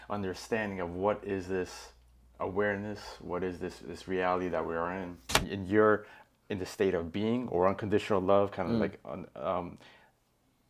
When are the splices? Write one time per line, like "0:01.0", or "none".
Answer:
0:05.5